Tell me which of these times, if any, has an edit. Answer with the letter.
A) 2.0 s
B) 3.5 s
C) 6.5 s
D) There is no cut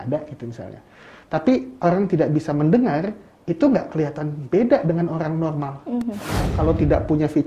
C